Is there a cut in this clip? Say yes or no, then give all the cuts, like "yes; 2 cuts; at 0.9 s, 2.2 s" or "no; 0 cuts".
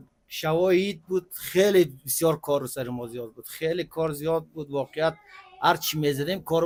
no; 0 cuts